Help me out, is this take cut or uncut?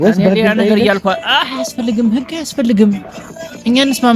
uncut